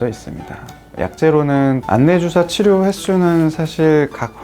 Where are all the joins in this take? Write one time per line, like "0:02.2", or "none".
0:01.8